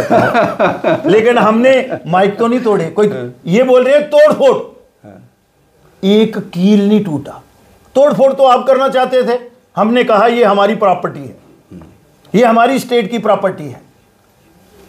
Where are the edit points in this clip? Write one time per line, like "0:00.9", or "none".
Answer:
none